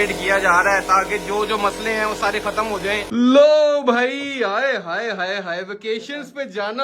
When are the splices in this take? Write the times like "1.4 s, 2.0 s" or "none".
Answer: 3.0 s

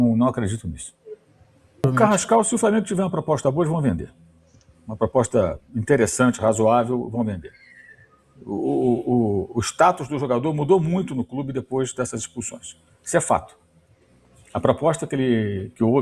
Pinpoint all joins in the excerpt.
1.8 s

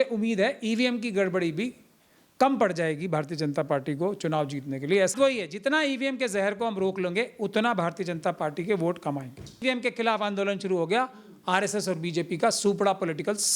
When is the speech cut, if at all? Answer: 5.1 s, 9.6 s

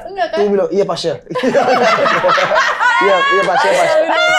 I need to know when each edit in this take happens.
none

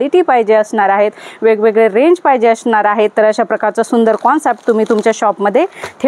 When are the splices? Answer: none

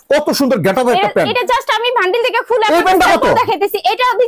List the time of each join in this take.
none

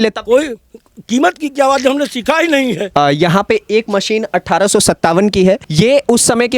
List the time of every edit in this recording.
2.8 s, 5.7 s

